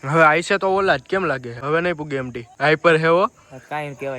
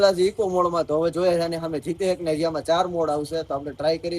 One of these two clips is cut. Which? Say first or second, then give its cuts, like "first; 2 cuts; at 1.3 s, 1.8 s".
first; 2 cuts; at 1.5 s, 2.4 s